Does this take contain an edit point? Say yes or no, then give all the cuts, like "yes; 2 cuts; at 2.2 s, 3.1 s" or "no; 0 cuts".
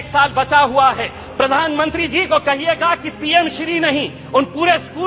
yes; 1 cut; at 1.2 s